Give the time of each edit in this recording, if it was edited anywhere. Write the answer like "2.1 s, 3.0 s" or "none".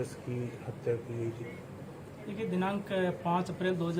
1.2 s

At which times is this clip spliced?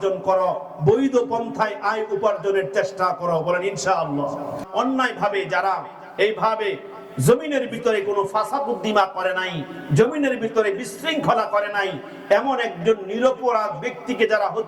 4.6 s

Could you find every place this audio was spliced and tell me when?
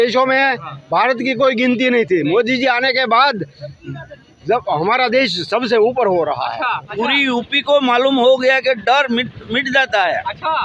6.9 s

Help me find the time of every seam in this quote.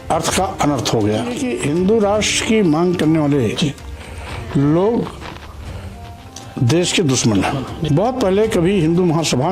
1.5 s, 7.8 s

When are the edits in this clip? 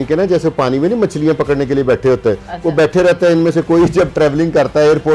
none

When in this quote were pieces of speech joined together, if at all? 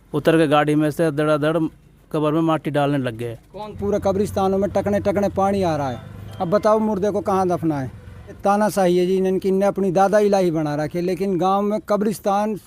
3.8 s, 8.4 s

